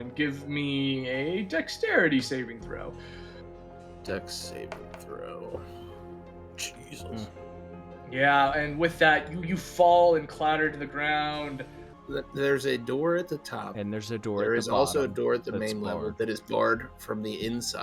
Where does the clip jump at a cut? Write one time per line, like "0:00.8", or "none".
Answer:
0:11.9